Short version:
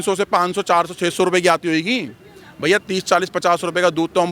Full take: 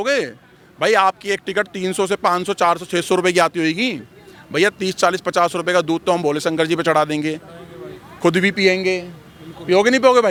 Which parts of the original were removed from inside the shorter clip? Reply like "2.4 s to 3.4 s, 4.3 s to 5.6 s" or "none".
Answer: none